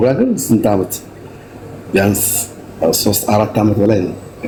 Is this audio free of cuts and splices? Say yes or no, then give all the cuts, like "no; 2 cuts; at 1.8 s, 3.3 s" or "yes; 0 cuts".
yes; 0 cuts